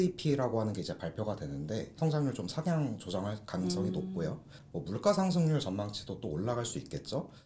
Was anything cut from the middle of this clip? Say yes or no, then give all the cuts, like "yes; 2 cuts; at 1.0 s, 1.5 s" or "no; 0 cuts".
yes; 2 cuts; at 1.9 s, 4.5 s